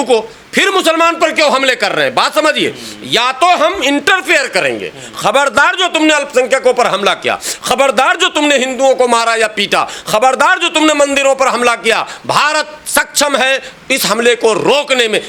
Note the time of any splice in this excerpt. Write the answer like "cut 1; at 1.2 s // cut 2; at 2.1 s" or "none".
none